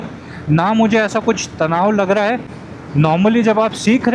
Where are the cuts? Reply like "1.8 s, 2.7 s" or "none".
2.5 s

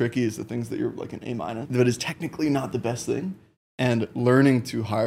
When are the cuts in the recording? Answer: 1.6 s

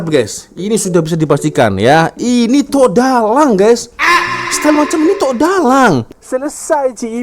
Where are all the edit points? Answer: 6.1 s

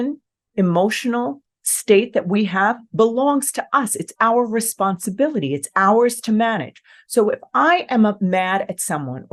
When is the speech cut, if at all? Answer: none

